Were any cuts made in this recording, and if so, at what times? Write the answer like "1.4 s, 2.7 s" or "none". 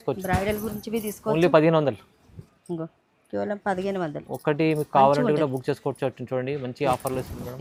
none